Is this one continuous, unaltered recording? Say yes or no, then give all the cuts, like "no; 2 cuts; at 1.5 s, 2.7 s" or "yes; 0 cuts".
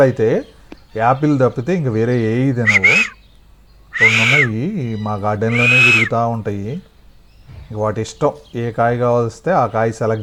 yes; 0 cuts